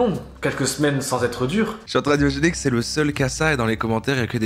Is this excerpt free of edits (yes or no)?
no